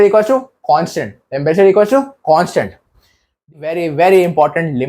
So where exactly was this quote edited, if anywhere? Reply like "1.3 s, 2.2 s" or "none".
3.5 s